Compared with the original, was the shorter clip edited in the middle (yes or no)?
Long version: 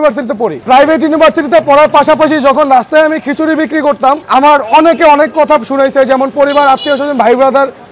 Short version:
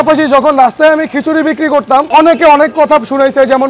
yes